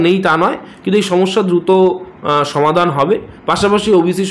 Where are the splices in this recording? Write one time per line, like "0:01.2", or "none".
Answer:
none